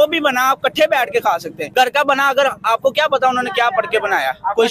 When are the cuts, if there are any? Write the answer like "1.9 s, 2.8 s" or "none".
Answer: 1.6 s